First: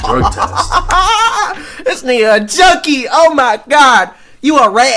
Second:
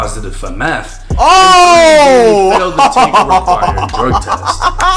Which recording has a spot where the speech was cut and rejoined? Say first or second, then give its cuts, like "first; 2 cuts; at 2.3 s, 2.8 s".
second; 1 cut; at 0.9 s